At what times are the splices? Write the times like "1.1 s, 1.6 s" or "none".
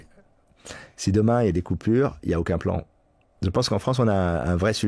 3.3 s